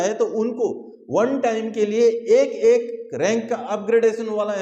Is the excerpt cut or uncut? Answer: uncut